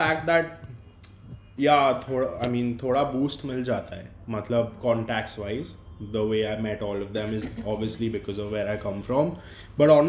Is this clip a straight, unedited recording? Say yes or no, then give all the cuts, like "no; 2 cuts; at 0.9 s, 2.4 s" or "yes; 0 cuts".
yes; 0 cuts